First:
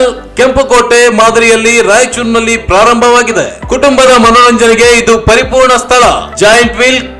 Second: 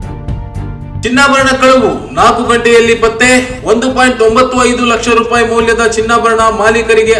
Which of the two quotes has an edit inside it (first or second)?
second